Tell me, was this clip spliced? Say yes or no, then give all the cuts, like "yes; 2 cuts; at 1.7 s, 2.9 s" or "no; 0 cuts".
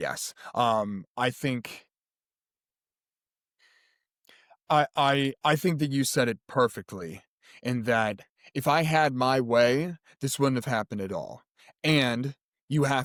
no; 0 cuts